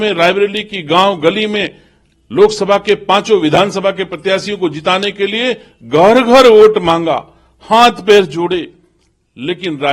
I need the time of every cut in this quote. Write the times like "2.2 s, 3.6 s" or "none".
none